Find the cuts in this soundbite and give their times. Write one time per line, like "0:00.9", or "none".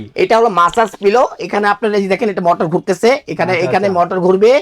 none